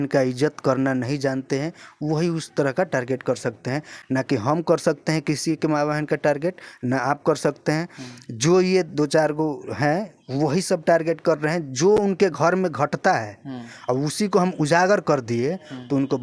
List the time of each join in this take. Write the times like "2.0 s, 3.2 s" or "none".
none